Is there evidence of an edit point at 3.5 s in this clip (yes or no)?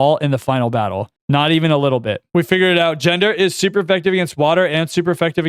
no